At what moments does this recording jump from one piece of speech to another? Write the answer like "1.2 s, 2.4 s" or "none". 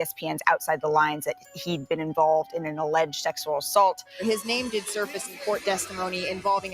4.1 s